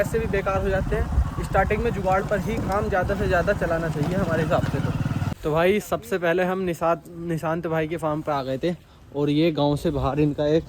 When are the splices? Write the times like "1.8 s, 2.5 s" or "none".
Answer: 5.4 s